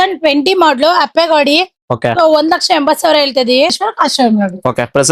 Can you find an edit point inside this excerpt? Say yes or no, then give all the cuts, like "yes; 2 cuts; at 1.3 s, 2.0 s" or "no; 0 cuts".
yes; 1 cut; at 3.7 s